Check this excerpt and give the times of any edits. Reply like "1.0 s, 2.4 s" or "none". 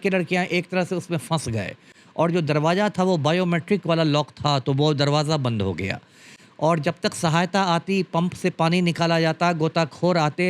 none

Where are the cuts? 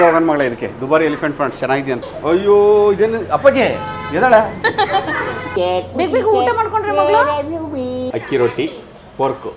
2.1 s, 5.4 s, 8.0 s

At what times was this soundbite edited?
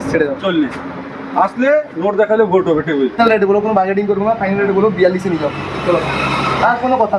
3.2 s

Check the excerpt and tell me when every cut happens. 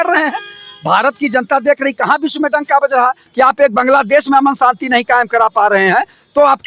none

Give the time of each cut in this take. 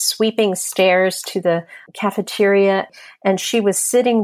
1.8 s, 2.9 s

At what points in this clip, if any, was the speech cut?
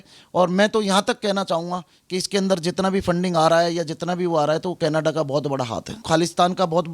6.0 s

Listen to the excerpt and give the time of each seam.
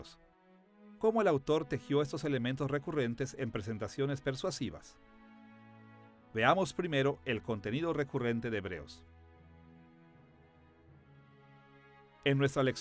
2.7 s

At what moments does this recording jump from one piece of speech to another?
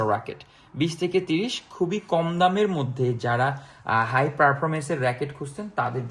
none

